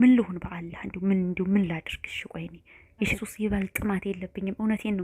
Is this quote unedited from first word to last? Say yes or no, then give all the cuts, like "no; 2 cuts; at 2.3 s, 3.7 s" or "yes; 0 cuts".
no; 1 cut; at 3.1 s